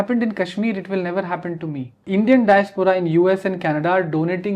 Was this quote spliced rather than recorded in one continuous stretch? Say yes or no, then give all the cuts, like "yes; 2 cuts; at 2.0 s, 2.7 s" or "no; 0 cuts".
yes; 1 cut; at 2.0 s